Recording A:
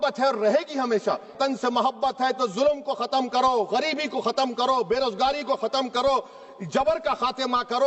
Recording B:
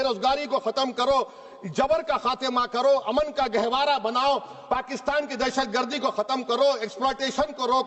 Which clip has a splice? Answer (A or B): A